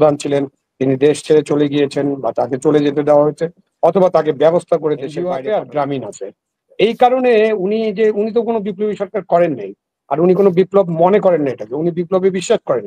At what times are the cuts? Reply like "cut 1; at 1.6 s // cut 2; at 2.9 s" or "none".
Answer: cut 1; at 5.2 s